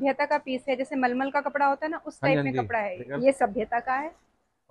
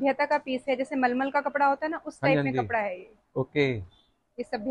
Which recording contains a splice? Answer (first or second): first